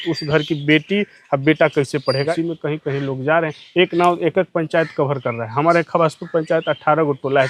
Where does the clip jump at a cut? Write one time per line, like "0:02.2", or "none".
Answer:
0:02.3